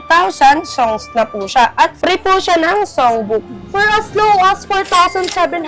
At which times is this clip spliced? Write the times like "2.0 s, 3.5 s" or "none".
3.6 s